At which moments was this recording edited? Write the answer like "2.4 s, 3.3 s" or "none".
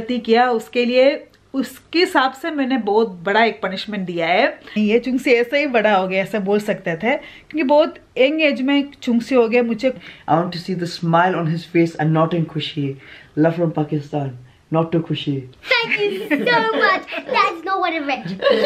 4.8 s, 10.0 s, 13.2 s, 15.5 s